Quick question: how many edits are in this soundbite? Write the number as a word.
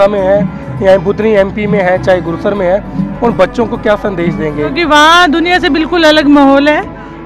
one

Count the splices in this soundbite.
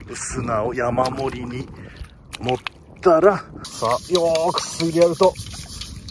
one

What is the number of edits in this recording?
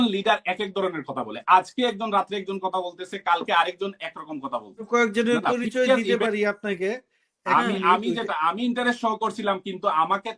one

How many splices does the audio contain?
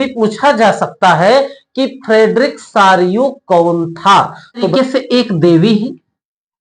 one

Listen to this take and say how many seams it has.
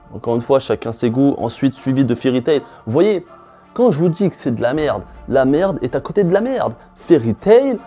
zero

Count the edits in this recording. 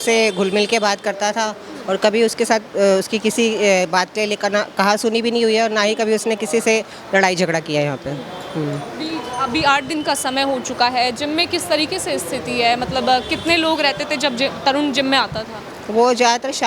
zero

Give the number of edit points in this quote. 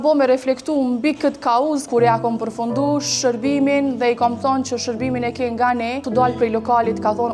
two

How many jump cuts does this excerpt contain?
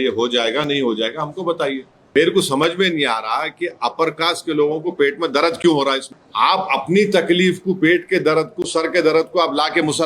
two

